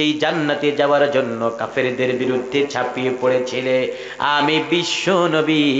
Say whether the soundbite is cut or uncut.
uncut